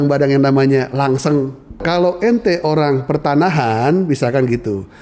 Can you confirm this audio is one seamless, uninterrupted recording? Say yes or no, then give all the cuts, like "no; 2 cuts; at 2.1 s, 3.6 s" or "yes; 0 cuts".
no; 1 cut; at 1.8 s